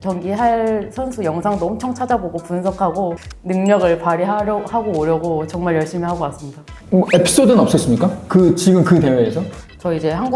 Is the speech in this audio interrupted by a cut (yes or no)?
no